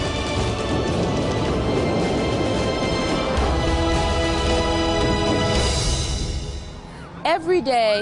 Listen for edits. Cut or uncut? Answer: uncut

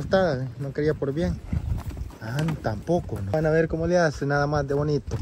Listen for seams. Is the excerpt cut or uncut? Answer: cut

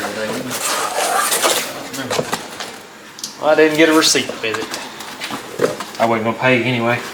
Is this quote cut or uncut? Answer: uncut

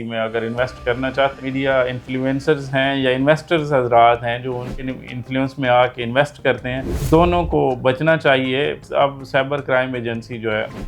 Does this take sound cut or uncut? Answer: cut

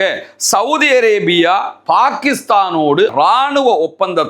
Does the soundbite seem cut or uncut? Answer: cut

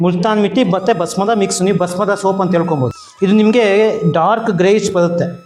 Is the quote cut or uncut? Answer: uncut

